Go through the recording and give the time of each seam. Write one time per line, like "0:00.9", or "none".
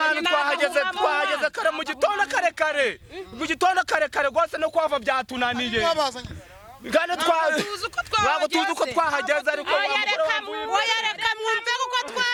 none